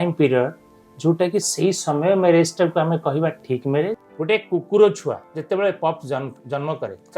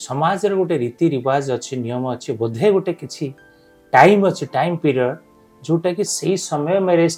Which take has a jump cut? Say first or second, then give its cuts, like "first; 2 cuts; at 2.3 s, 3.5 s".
first; 2 cuts; at 4.0 s, 5.3 s